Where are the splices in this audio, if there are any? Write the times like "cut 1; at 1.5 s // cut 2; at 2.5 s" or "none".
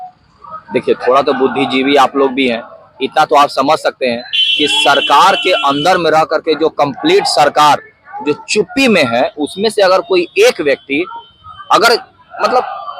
none